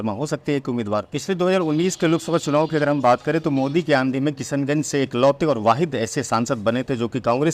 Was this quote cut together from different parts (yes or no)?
yes